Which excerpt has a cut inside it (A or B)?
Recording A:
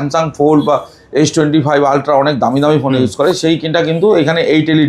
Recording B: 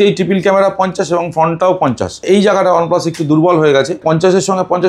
B